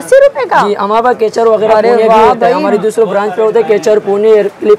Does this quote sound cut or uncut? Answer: uncut